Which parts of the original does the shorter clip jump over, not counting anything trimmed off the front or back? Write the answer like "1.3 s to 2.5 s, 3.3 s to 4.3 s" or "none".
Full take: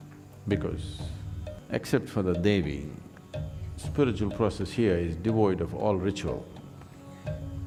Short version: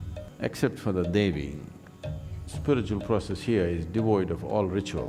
none